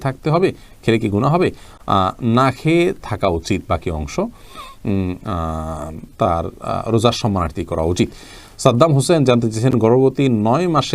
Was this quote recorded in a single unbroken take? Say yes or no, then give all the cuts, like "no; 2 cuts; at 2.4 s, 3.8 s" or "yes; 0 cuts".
yes; 0 cuts